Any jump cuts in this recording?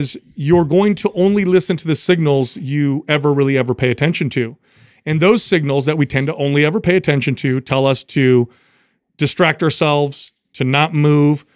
no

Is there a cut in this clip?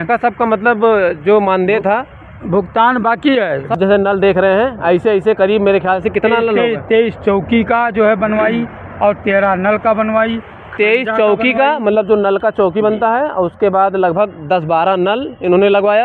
yes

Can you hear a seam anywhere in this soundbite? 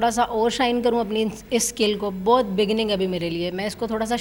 no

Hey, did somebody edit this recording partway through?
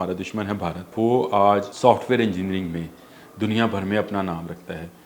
yes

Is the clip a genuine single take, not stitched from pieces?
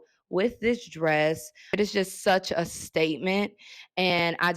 no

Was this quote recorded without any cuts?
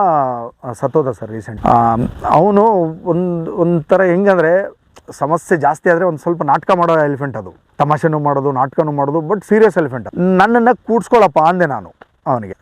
yes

